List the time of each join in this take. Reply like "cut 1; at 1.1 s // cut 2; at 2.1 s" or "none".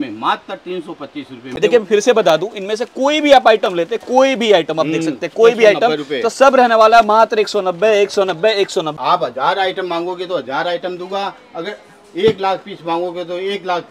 cut 1; at 1.4 s // cut 2; at 8.9 s